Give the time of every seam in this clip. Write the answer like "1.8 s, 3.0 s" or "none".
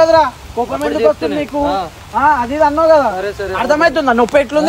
none